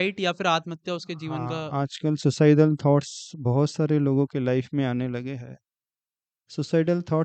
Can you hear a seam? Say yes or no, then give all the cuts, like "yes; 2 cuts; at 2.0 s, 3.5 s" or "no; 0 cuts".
no; 0 cuts